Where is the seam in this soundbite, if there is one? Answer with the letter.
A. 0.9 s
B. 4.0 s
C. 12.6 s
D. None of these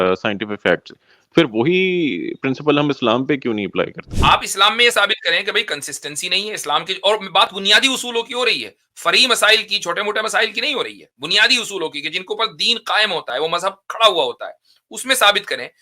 B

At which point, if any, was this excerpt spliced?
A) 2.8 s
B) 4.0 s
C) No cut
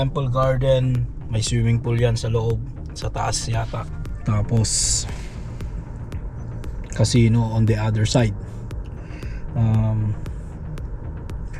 B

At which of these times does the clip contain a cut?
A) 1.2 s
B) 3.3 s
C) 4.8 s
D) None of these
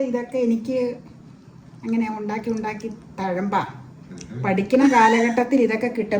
D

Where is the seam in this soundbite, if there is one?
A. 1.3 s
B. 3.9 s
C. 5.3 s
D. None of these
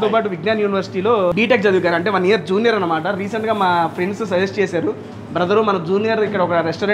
A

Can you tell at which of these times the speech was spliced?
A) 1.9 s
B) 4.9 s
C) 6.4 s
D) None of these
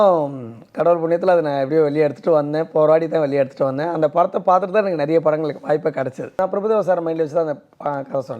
C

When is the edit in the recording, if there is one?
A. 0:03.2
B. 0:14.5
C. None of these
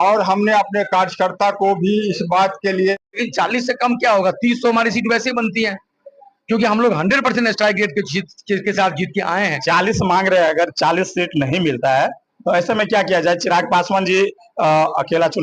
A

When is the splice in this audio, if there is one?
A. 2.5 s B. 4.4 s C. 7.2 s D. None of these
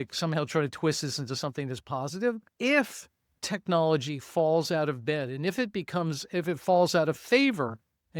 A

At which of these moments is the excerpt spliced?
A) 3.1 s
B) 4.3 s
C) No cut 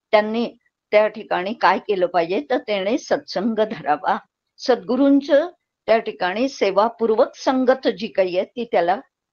C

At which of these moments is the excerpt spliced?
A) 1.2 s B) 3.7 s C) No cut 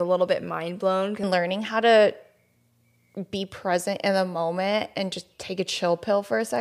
A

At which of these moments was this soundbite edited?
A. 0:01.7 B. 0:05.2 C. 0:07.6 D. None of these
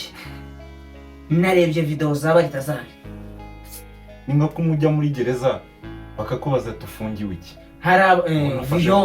D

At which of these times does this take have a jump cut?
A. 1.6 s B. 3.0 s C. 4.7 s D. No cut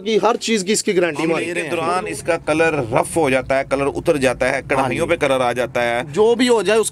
A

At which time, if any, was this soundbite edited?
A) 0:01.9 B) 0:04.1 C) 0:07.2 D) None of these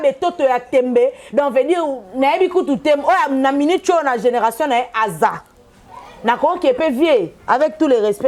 D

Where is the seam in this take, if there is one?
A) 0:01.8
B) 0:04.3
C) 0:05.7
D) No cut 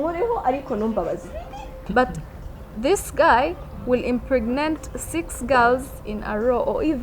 A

